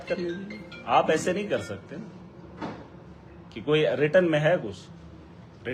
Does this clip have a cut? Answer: no; 0 cuts

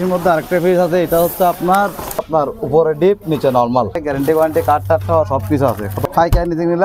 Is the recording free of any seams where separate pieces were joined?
no; 3 cuts; at 2.2 s, 4.0 s, 5.9 s

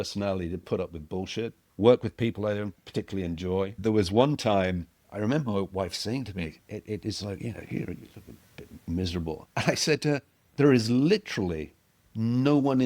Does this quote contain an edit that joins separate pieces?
yes; 6 cuts; at 1.6 s, 2.8 s, 3.7 s, 5.0 s, 9.4 s, 10.4 s

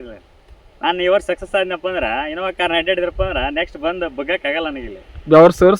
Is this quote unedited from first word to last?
yes; 0 cuts

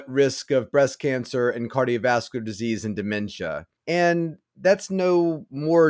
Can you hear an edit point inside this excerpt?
yes; 1 cut; at 3.7 s

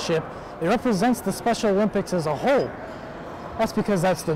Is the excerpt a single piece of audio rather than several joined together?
yes; 0 cuts

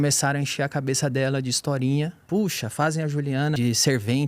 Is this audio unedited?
no; 2 cuts; at 2.2 s, 3.6 s

